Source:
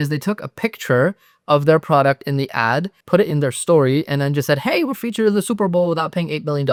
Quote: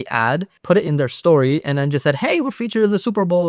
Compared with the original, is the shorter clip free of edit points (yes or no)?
yes